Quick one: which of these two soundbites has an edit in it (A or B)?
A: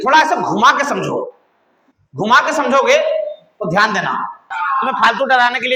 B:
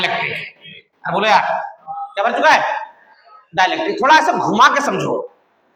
A